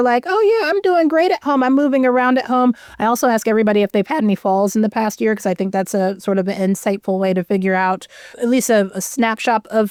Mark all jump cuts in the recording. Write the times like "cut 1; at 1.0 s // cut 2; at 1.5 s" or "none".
none